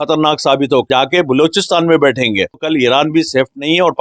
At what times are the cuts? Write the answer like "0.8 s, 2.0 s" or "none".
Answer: 0.9 s, 2.5 s